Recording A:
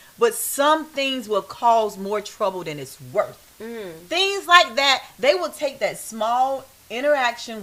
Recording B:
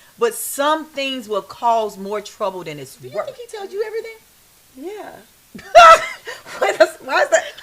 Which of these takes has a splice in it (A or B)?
B